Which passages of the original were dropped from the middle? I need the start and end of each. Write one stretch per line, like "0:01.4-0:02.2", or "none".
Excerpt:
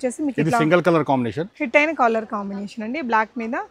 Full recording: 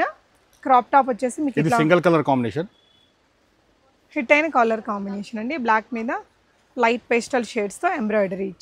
0:02.7-0:04.1